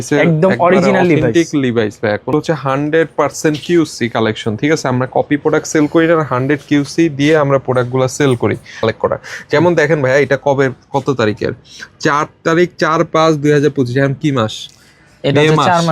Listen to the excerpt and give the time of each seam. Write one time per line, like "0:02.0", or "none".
0:02.3
0:08.8